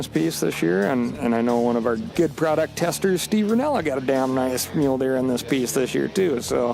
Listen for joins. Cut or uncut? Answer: cut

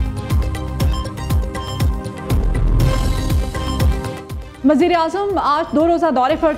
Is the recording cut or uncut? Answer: cut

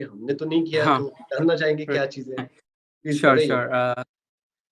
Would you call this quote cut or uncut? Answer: uncut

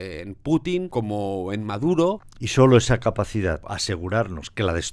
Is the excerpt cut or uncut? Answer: cut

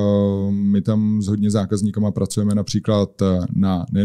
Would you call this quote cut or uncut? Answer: uncut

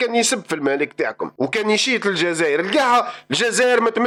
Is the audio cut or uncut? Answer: uncut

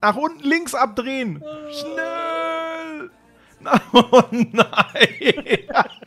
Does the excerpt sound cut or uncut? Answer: uncut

